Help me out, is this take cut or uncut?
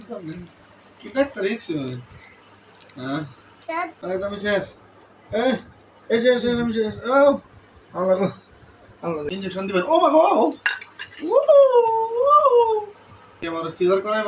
cut